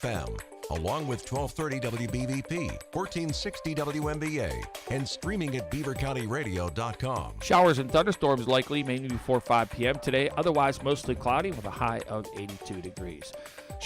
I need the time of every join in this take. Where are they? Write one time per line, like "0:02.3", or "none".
0:07.3